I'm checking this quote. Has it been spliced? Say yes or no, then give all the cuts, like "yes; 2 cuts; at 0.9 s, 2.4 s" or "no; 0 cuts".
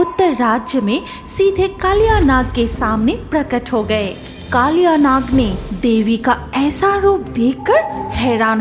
no; 0 cuts